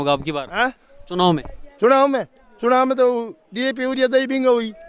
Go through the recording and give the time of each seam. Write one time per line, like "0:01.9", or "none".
none